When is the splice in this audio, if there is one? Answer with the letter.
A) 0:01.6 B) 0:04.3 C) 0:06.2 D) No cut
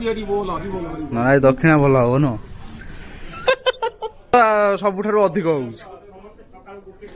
B